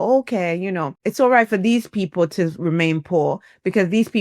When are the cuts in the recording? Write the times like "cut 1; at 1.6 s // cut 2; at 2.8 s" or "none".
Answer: cut 1; at 1.0 s